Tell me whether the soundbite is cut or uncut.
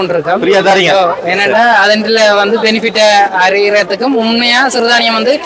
uncut